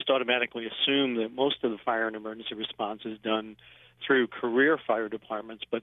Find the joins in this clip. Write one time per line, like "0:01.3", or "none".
none